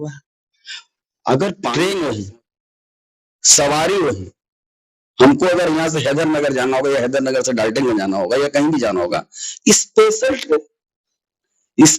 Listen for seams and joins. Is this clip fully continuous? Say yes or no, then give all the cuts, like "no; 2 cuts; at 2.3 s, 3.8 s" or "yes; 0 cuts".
no; 1 cut; at 1.7 s